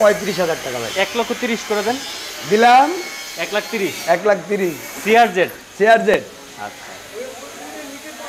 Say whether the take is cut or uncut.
uncut